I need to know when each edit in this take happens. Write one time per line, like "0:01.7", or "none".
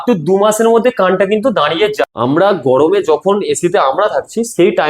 0:02.0